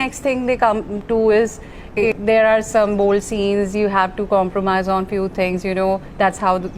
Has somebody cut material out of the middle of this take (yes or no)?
yes